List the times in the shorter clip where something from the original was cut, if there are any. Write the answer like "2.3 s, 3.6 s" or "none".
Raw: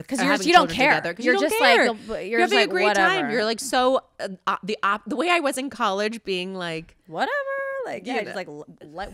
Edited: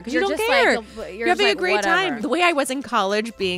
2.2 s